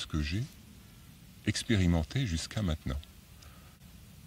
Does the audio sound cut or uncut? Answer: uncut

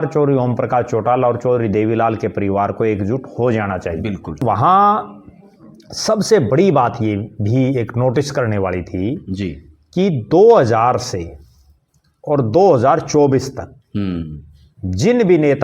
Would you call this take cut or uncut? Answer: cut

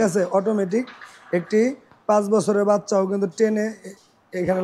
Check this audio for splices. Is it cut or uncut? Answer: uncut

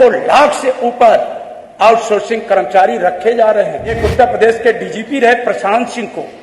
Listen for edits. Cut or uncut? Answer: cut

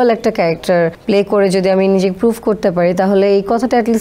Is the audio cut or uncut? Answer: cut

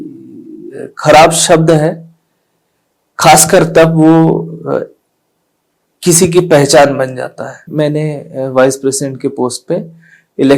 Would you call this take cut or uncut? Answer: cut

